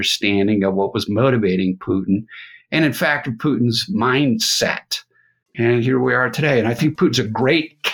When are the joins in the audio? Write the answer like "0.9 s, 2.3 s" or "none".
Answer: 5.4 s, 6.8 s